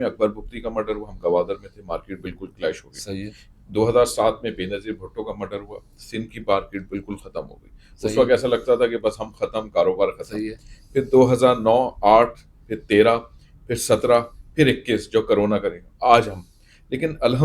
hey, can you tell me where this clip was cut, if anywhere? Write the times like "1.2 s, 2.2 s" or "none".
none